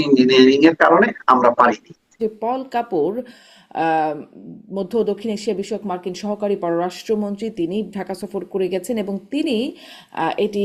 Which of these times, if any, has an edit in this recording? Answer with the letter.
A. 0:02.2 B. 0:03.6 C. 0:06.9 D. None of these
A